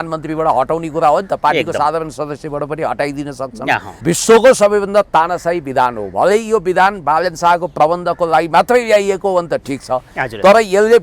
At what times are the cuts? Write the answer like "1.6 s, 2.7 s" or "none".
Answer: 3.9 s